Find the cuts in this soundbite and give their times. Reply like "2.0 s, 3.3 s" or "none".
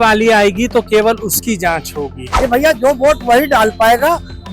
2.2 s